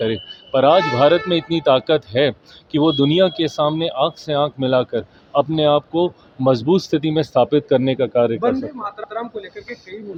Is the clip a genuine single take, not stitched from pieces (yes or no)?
yes